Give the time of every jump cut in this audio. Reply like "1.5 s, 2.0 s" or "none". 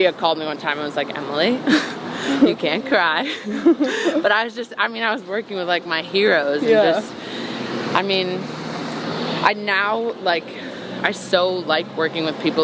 none